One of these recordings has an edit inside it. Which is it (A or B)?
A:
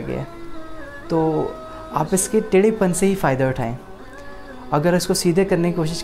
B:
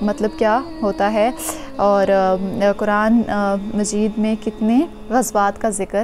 B